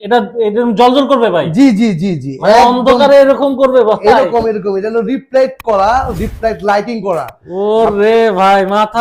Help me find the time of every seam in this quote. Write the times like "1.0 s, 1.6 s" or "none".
none